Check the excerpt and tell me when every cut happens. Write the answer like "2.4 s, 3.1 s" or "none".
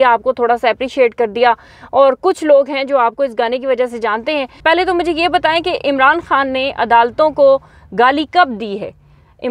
none